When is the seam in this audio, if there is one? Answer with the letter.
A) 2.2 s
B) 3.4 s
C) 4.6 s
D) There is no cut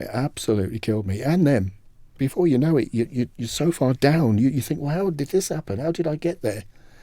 A